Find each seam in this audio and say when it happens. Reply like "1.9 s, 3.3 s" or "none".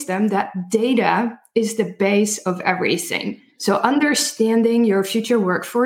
none

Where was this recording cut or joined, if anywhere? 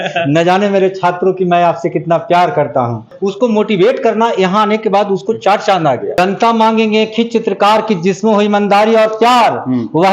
3.1 s, 6.2 s

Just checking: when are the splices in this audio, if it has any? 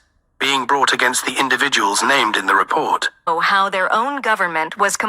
3.3 s

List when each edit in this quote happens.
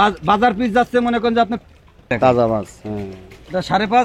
2.1 s

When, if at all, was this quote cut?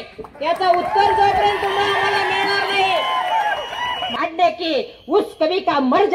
4.2 s

